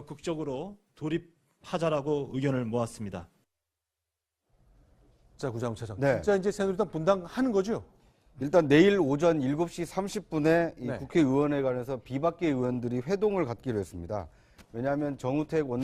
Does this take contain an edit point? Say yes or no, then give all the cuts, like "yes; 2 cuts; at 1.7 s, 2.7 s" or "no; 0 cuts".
yes; 1 cut; at 1.7 s